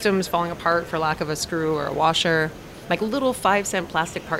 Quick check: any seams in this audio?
no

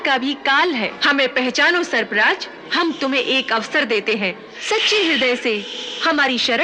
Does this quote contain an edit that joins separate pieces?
yes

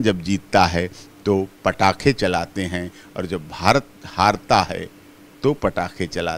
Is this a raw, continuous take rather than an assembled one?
yes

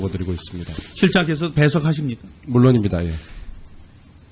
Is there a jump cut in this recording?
yes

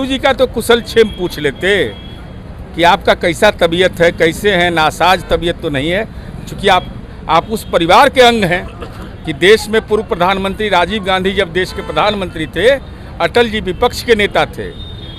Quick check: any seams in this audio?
no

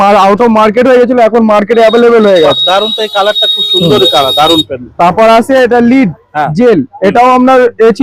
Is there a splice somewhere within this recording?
no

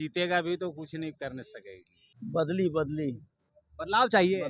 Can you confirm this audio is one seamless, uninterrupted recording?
no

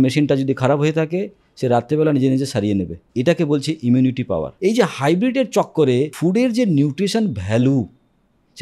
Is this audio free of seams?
no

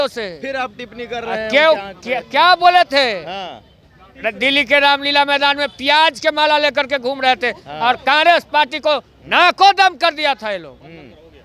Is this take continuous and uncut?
yes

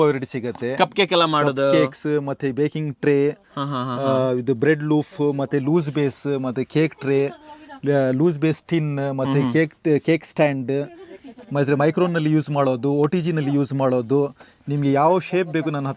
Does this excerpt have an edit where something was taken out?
no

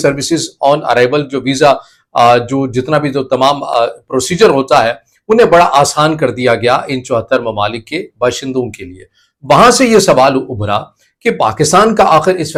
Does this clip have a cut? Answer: no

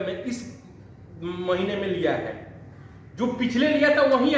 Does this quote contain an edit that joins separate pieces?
no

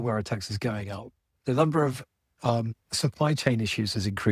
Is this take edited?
no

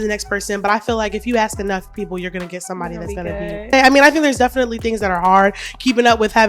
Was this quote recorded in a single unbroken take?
no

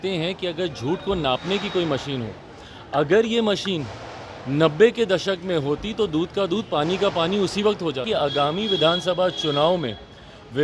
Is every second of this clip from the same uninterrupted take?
no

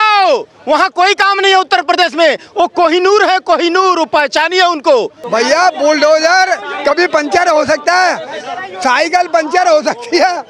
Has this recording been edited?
yes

